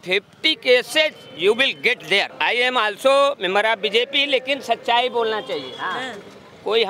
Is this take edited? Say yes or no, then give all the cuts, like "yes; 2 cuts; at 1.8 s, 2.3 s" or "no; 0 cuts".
yes; 1 cut; at 2.3 s